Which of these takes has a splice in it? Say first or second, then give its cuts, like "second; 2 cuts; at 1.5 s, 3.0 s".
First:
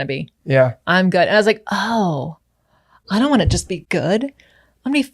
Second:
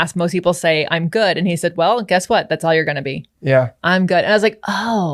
first; 1 cut; at 3.8 s